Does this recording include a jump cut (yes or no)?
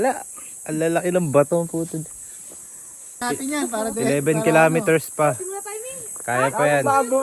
yes